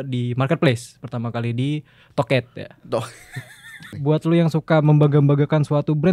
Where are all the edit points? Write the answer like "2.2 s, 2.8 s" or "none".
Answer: 3.9 s